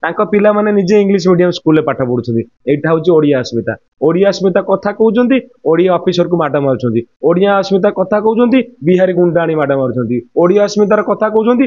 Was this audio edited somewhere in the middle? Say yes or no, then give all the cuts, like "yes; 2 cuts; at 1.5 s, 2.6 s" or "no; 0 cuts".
no; 0 cuts